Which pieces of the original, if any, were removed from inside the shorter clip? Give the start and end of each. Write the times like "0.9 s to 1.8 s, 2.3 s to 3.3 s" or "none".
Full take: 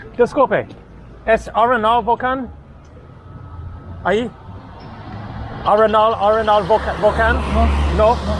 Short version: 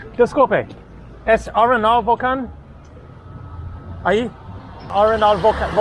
4.9 s to 6.2 s